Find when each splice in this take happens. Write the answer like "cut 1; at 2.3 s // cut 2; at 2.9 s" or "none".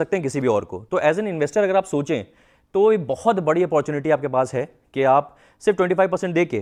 none